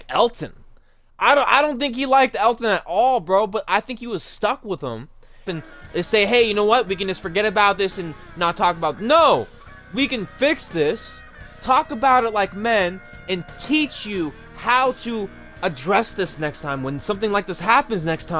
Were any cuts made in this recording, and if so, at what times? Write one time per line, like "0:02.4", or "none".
0:05.5